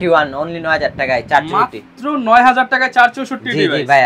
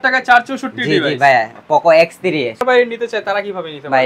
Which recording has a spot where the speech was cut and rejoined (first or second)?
second